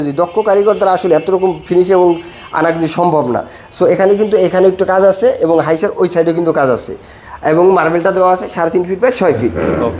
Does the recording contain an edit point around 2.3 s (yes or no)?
no